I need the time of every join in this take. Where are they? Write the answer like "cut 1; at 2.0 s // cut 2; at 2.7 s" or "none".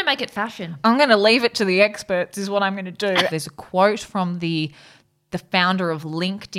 cut 1; at 3.3 s